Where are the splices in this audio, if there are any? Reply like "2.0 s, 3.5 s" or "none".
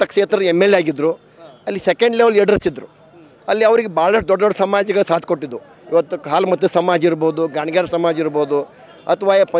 none